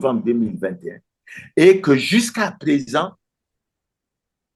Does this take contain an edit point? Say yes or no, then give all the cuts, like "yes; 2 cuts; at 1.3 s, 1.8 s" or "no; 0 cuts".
no; 0 cuts